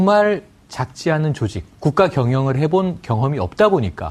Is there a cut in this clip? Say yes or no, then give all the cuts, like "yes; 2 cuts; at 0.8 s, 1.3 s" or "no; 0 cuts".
no; 0 cuts